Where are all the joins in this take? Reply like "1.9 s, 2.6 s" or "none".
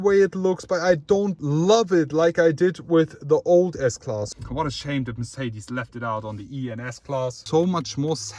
1.4 s, 4.3 s, 7.4 s